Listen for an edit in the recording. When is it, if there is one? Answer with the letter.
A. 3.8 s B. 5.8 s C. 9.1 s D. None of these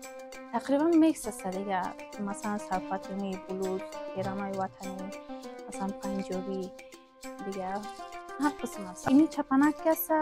C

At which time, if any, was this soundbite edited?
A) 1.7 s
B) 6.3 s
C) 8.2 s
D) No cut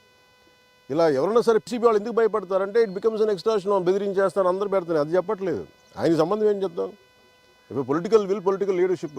A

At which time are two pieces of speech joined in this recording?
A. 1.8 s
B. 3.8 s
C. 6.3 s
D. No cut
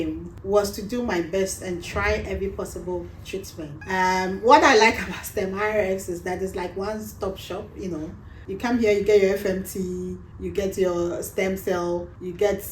B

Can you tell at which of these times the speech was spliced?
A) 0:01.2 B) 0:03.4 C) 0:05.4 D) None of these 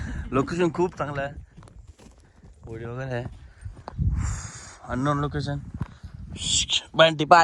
D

